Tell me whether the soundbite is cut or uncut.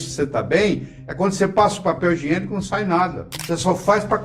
cut